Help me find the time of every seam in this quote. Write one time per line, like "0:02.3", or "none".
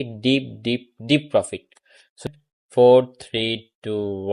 0:02.2